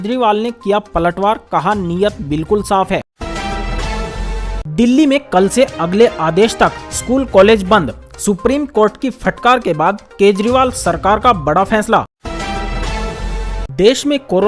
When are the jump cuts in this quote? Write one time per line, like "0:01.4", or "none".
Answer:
0:03.2
0:04.4
0:12.2